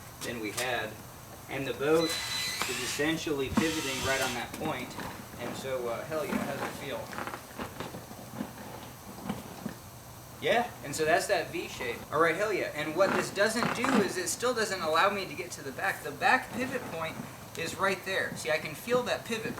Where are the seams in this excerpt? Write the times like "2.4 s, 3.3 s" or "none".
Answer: 5.2 s, 12.0 s